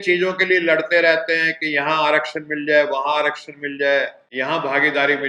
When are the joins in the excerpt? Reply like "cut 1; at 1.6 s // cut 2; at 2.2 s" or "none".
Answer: cut 1; at 4.2 s